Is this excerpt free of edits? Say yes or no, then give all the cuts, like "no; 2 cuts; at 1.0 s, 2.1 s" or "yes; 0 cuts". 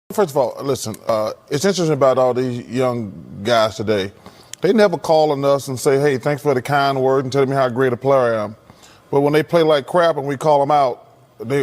no; 1 cut; at 1.1 s